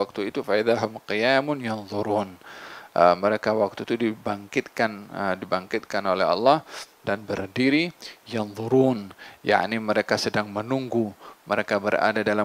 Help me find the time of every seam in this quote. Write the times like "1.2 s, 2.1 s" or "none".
none